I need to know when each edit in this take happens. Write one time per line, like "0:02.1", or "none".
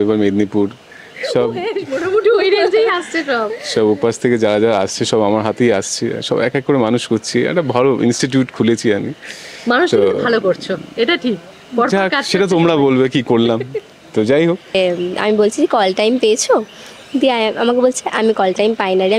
0:14.7